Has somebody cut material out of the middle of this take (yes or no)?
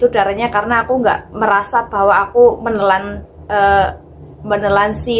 no